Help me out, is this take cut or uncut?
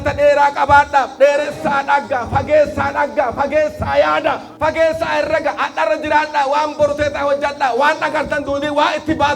cut